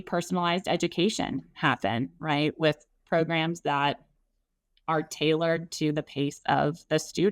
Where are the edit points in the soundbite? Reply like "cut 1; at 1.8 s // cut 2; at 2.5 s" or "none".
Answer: none

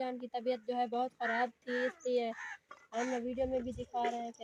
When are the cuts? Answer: none

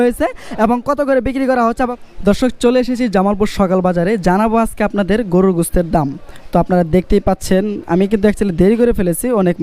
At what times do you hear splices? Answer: cut 1; at 1.9 s

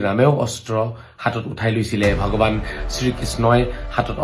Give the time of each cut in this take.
none

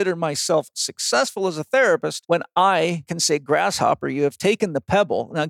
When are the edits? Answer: cut 1; at 2.1 s // cut 2; at 3.1 s

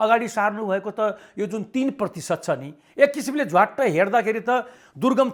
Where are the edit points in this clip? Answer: none

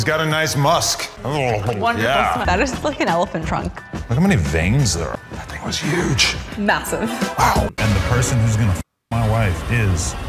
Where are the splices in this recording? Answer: cut 1; at 2.4 s // cut 2; at 5.2 s // cut 3; at 7.7 s

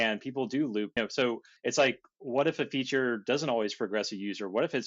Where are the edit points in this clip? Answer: cut 1; at 1.2 s // cut 2; at 2.1 s

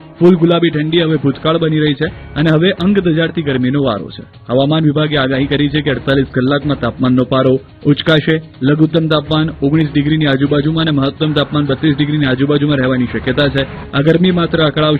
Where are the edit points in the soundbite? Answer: none

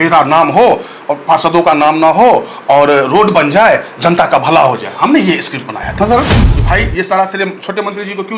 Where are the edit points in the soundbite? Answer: cut 1; at 6.4 s

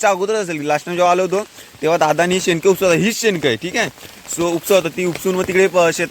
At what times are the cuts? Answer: none

